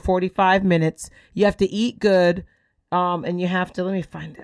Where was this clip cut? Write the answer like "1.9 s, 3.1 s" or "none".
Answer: none